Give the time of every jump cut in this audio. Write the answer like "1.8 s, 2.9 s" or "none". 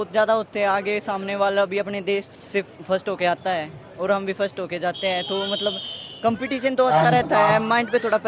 none